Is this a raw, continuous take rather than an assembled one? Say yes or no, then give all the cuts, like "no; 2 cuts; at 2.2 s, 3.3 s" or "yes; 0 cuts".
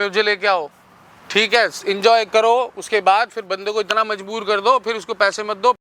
yes; 0 cuts